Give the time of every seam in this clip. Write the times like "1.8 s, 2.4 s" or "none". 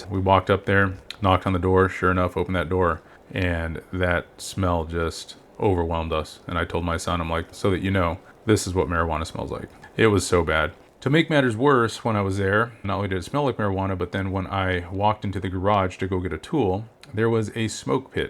10.8 s